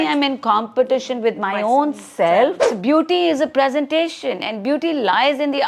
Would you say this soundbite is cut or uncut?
cut